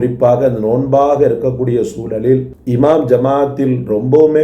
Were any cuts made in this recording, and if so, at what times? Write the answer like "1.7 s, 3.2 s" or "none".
2.7 s